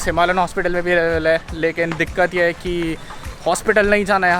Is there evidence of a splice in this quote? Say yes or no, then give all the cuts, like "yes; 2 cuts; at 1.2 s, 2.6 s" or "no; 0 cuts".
no; 0 cuts